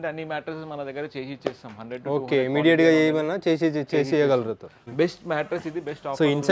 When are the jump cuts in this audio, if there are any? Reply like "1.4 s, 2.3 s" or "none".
4.9 s